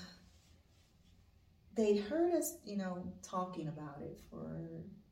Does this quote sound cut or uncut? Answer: uncut